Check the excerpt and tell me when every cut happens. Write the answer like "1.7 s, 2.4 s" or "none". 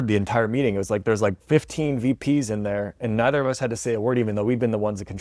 none